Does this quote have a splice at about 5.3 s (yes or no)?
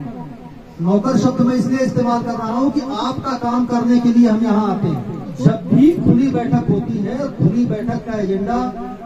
yes